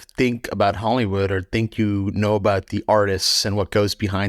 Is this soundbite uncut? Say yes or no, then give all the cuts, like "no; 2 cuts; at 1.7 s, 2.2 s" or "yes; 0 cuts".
yes; 0 cuts